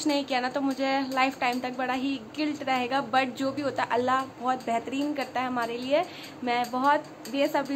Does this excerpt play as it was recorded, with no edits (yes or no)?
yes